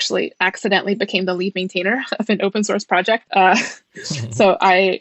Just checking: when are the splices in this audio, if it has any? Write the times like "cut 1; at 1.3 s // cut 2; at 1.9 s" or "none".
cut 1; at 3.2 s

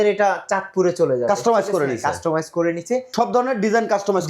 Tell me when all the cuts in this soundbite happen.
cut 1; at 3.1 s

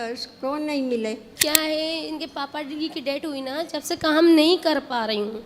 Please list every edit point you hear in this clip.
cut 1; at 1.3 s

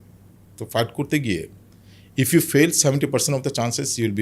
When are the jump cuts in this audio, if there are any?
none

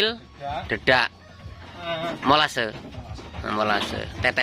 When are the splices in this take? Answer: cut 1; at 1.8 s

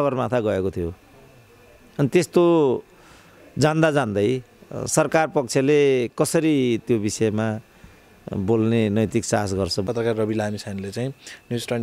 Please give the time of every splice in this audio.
cut 1; at 9.9 s

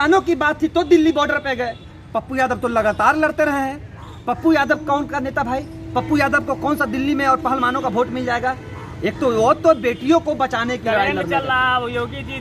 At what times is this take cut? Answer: none

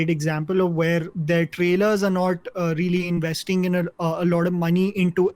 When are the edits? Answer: cut 1; at 1.1 s

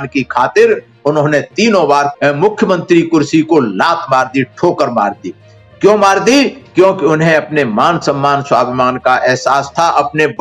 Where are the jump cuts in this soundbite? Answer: cut 1; at 2.1 s

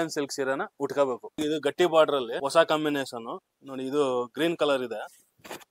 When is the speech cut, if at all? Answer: cut 1; at 1.3 s // cut 2; at 2.4 s

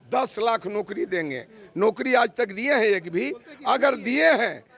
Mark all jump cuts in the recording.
none

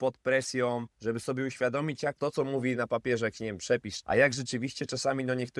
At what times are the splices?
cut 1; at 0.9 s // cut 2; at 2.2 s // cut 3; at 3.9 s

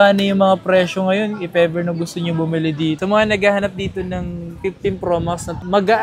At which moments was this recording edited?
cut 1; at 3.0 s

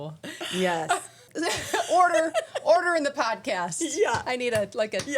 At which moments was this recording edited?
cut 1; at 1.3 s

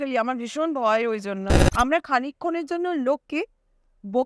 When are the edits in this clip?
cut 1; at 1.5 s

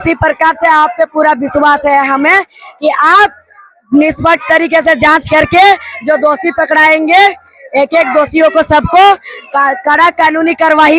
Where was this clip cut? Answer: none

